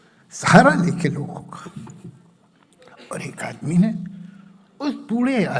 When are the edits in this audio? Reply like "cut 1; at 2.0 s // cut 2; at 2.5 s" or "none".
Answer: none

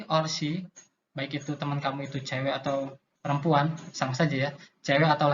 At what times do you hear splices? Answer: cut 1; at 3.1 s

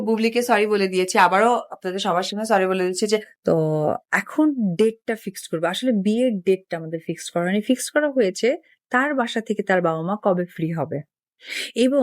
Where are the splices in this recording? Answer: cut 1; at 3.3 s

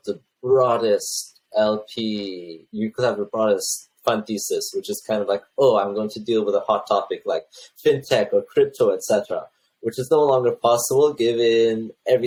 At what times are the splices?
none

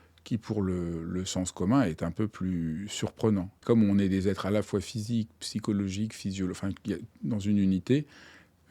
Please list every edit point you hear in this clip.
cut 1; at 3.5 s

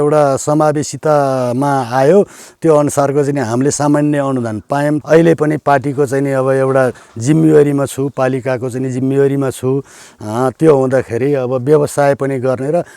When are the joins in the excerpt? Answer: cut 1; at 5.0 s

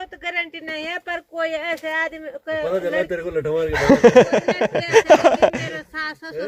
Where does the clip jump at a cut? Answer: none

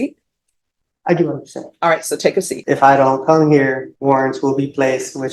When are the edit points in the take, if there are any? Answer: cut 1; at 2.5 s // cut 2; at 3.9 s

